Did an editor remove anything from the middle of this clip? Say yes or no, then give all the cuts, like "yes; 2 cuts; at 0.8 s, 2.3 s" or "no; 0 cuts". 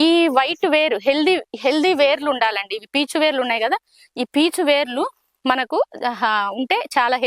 no; 0 cuts